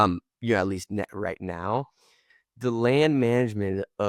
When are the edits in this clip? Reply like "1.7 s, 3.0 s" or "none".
none